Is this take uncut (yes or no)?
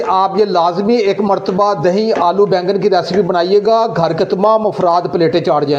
yes